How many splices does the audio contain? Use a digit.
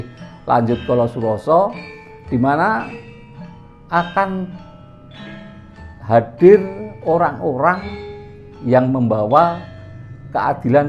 0